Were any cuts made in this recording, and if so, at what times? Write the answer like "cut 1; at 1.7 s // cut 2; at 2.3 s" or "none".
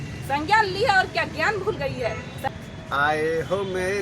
cut 1; at 2.4 s